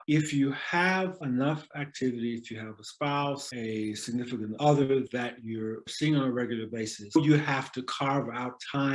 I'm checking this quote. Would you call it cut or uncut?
cut